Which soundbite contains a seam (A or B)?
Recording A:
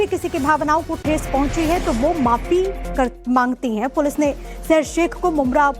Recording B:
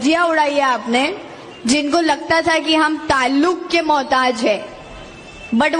A